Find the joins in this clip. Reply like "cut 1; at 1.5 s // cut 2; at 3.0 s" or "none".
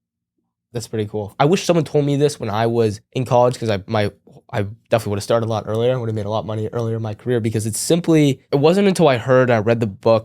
cut 1; at 1.3 s // cut 2; at 3.1 s // cut 3; at 8.4 s